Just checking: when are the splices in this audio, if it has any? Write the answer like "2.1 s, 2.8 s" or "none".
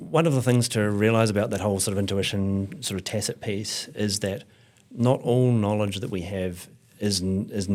none